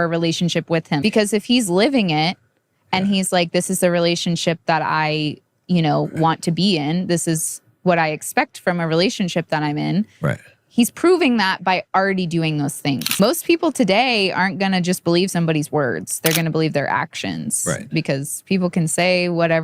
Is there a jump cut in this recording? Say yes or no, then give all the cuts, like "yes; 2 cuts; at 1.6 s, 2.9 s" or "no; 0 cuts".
yes; 2 cuts; at 1.0 s, 13.1 s